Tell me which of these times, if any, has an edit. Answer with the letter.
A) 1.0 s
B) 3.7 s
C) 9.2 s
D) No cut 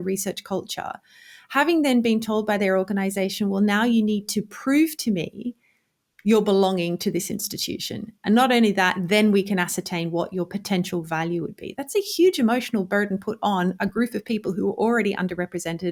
D